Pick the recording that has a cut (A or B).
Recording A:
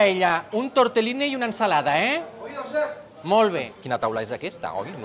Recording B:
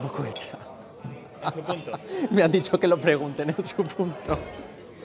A